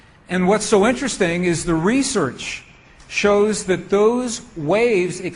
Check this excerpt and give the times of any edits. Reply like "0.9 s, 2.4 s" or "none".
4.5 s